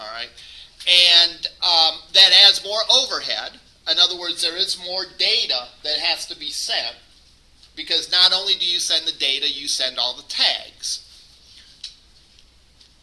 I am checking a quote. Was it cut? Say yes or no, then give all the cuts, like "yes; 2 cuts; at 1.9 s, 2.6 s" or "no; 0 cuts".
no; 0 cuts